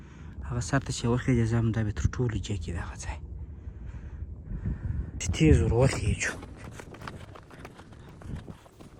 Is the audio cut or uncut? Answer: uncut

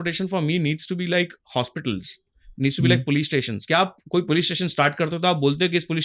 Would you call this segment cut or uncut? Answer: uncut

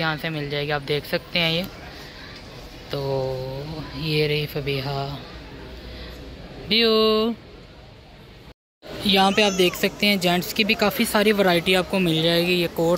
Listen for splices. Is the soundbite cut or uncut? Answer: uncut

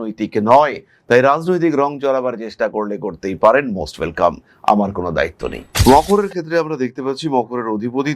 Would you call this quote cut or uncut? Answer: cut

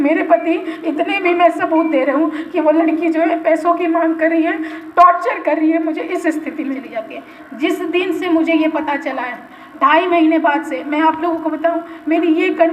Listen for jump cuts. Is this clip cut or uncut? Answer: cut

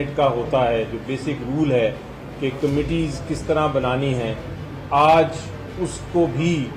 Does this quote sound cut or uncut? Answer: uncut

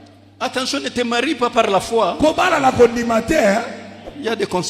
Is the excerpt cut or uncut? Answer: uncut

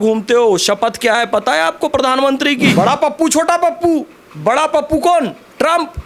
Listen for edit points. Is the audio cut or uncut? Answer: cut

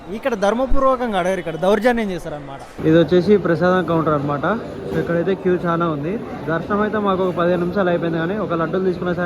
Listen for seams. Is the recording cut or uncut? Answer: cut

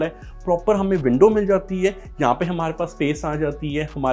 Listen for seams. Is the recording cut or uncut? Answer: uncut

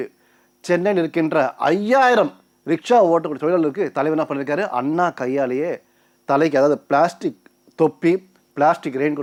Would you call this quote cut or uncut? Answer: uncut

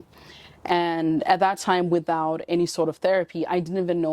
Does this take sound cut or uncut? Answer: uncut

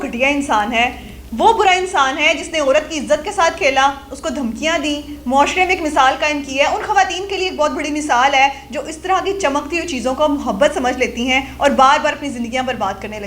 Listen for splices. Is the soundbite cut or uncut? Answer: uncut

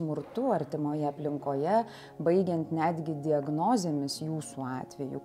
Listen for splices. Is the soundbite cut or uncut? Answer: uncut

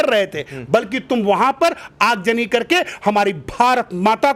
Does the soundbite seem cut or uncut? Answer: uncut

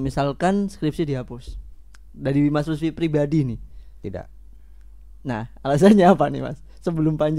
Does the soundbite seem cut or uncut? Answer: uncut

